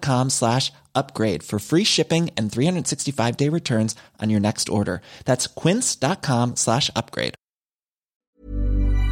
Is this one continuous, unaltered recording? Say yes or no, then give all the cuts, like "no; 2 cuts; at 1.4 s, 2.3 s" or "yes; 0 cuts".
no; 1 cut; at 8.1 s